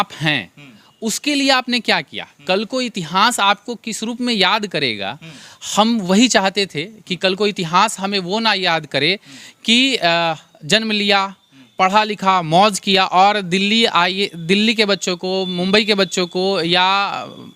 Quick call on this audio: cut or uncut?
uncut